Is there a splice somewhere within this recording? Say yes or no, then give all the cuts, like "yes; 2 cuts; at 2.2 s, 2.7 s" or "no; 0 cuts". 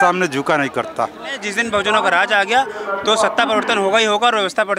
yes; 1 cut; at 1.4 s